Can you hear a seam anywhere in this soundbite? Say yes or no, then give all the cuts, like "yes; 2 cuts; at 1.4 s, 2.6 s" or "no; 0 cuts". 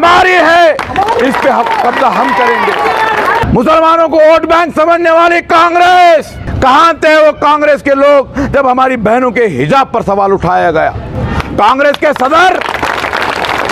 yes; 2 cuts; at 3.4 s, 6.4 s